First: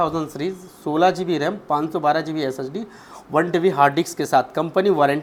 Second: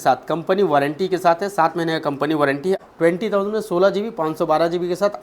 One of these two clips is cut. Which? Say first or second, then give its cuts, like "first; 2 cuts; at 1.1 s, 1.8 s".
second; 1 cut; at 2.8 s